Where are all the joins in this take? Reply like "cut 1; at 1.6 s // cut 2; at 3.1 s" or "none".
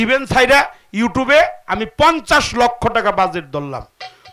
none